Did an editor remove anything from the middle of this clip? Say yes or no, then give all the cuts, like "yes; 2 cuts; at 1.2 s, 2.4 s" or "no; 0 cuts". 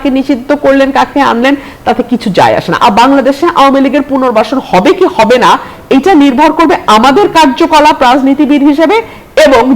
yes; 1 cut; at 2.8 s